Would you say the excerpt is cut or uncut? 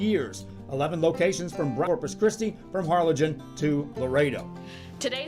cut